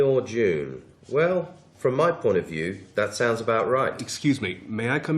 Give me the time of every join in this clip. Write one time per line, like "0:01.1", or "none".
0:04.0